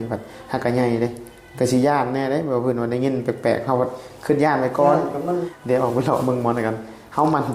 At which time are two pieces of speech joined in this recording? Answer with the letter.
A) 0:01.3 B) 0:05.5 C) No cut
B